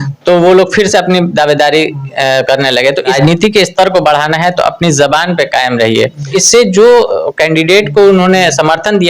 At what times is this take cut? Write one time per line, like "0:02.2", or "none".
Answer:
0:03.1
0:06.3